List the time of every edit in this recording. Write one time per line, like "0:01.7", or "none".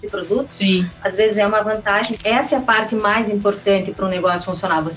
0:02.1